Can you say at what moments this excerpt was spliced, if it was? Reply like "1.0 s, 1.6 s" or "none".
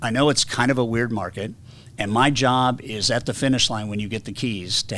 none

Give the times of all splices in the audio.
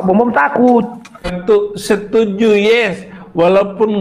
1.0 s

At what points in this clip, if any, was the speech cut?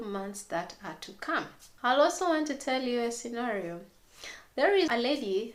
none

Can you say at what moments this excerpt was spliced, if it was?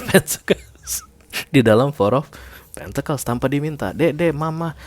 none

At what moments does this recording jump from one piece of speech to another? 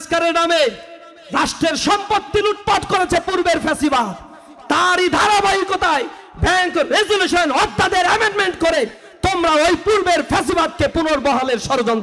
none

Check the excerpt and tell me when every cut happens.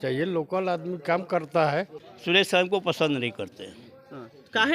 2.1 s

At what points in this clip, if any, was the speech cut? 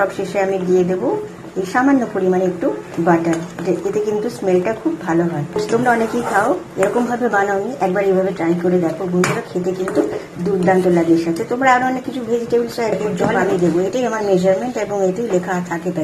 5.6 s, 13.5 s

